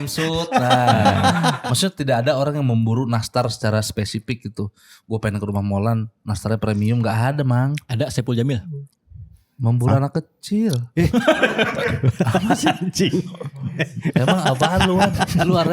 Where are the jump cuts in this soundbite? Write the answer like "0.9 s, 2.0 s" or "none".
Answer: 1.6 s